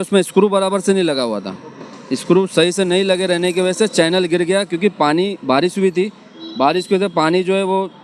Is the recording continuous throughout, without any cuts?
yes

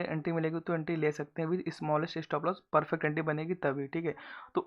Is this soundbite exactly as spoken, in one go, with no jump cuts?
yes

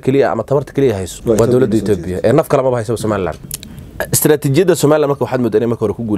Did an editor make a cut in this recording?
yes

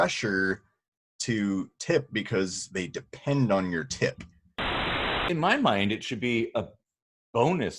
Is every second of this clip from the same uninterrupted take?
no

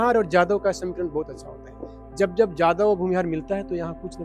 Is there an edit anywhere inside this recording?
no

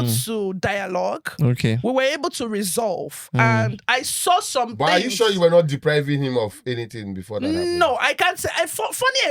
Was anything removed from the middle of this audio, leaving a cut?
no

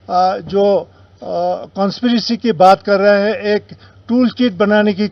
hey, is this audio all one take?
yes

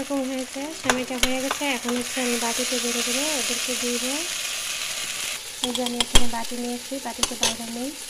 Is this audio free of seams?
yes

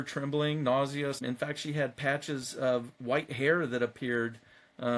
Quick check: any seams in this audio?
yes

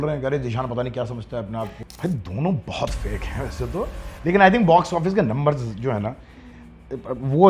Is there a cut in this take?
yes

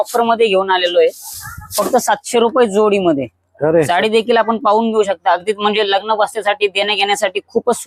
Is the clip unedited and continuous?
yes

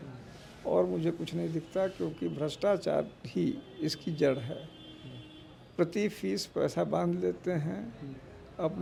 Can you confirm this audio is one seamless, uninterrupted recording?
yes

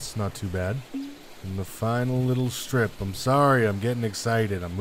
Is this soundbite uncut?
no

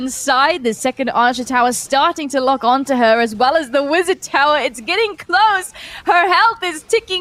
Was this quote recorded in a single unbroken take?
yes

